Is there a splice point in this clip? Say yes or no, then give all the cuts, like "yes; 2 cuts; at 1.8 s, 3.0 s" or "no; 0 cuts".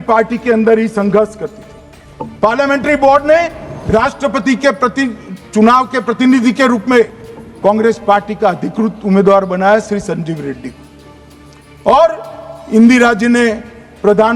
no; 0 cuts